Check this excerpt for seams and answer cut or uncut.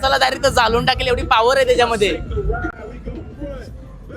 uncut